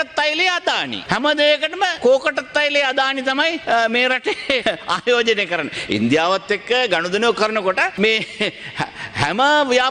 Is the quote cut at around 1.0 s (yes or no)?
yes